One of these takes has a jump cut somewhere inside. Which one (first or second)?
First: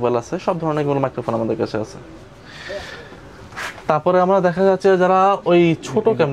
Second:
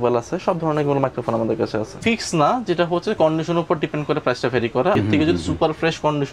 second